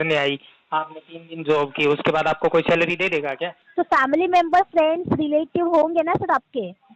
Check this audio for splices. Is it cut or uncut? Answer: cut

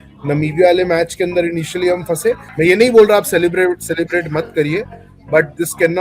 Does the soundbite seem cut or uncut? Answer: cut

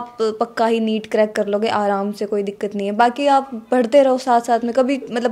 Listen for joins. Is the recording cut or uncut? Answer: uncut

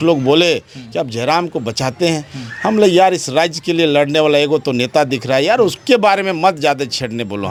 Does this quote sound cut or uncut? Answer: uncut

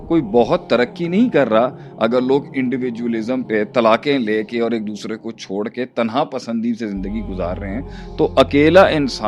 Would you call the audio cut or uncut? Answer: uncut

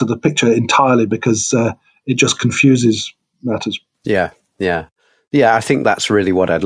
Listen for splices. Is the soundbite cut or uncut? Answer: uncut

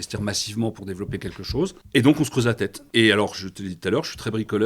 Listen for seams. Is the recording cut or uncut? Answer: cut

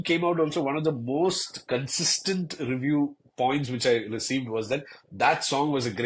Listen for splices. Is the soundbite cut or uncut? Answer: uncut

